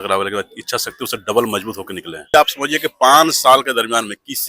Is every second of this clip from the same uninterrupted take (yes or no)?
no